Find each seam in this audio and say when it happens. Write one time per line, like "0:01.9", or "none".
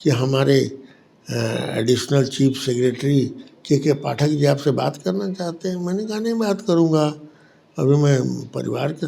none